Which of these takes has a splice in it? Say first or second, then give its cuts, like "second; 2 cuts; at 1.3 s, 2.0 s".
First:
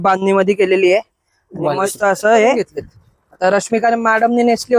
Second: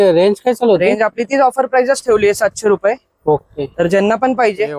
first; 1 cut; at 2.7 s